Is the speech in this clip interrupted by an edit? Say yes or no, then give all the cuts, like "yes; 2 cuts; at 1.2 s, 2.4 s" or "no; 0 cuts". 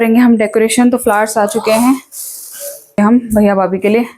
yes; 1 cut; at 3.0 s